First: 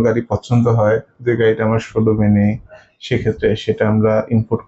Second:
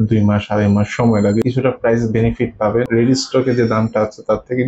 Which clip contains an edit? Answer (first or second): second